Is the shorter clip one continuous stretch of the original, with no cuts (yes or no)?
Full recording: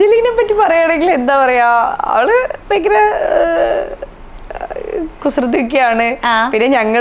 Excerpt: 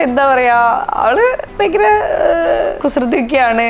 no